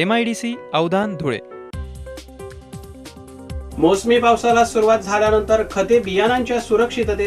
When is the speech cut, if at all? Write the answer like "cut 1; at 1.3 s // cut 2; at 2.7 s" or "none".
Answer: none